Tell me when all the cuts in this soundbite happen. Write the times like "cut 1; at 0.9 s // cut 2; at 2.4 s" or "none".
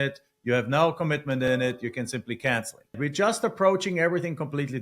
cut 1; at 3.0 s